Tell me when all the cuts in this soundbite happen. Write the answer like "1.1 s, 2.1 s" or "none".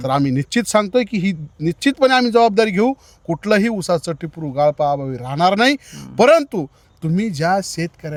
none